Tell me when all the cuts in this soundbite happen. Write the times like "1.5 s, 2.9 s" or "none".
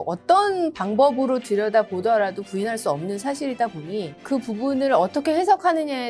4.2 s